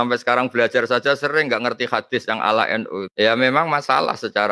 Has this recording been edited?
yes; 1 cut; at 3.1 s

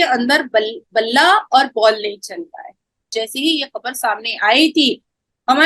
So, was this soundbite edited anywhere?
yes; 1 cut; at 3.1 s

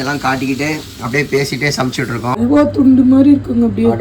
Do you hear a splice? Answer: yes; 1 cut; at 2.4 s

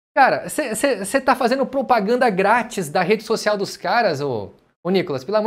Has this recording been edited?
no; 0 cuts

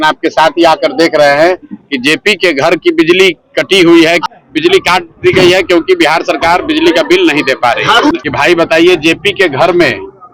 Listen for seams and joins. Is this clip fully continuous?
no; 2 cuts; at 4.2 s, 8.3 s

